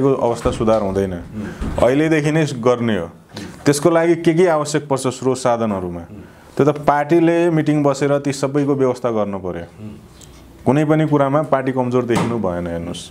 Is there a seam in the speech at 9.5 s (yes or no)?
no